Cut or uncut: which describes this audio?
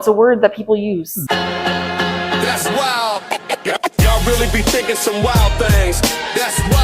cut